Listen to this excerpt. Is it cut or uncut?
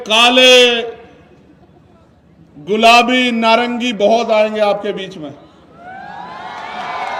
uncut